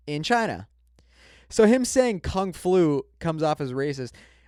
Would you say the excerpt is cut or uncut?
uncut